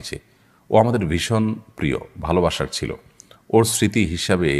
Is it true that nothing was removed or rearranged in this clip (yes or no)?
yes